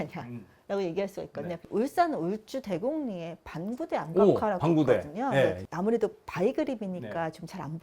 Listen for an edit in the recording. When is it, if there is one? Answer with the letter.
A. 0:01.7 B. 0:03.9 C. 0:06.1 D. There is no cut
A